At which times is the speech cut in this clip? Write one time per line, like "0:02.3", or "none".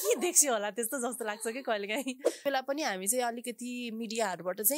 0:02.4